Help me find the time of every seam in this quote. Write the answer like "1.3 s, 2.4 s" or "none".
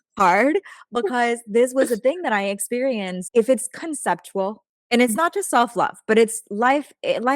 3.2 s

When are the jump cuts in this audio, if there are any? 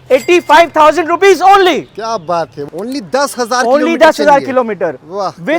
2.6 s

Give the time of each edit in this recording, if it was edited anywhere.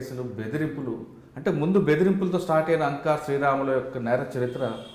none

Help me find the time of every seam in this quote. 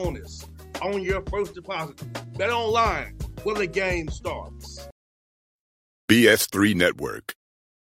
4.8 s

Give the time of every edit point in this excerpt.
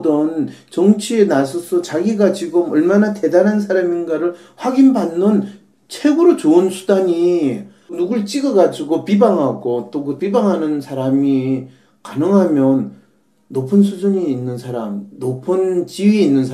10.4 s

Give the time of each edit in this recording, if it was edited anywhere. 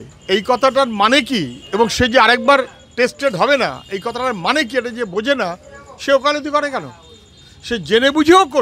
1.6 s

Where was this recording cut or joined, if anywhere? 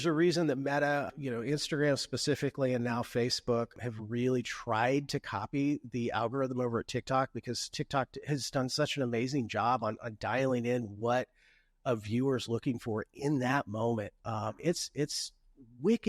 1.1 s, 3.7 s

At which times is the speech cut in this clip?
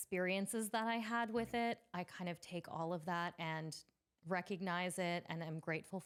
none

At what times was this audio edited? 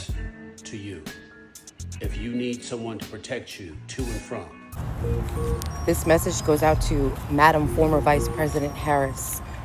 4.6 s

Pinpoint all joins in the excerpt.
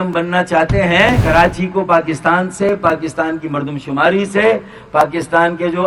1.2 s

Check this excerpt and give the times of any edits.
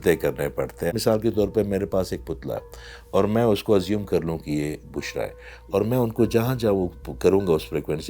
0.9 s

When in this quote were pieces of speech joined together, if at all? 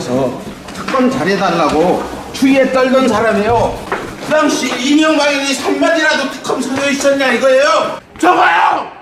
3.8 s, 8.0 s

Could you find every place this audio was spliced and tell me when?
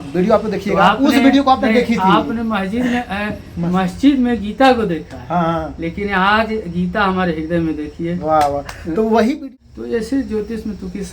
9.4 s

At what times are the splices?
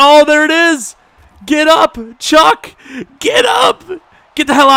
none

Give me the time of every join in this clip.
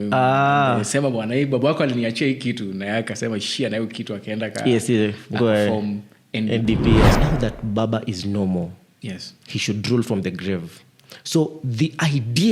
7.2 s

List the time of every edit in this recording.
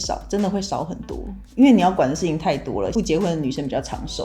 2.9 s

